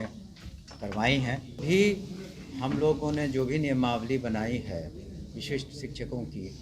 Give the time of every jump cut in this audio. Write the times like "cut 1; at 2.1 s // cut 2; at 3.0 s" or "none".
cut 1; at 1.6 s